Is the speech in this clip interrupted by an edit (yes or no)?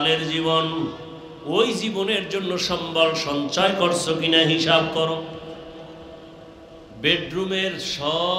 yes